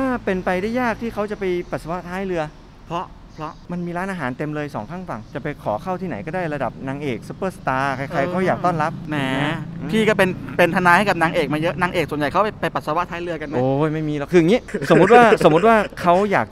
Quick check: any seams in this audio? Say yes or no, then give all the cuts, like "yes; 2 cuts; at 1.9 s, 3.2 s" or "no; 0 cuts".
no; 0 cuts